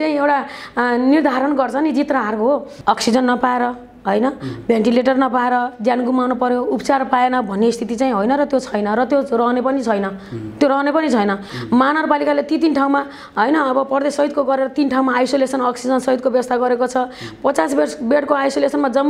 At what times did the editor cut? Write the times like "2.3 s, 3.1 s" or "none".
2.7 s, 11.5 s